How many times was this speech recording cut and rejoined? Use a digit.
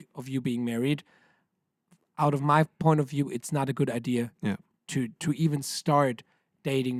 0